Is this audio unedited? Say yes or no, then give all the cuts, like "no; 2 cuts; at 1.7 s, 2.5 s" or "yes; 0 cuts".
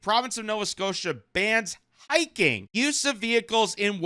no; 1 cut; at 2.6 s